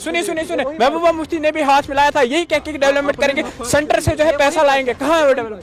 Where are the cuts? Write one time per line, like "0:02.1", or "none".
none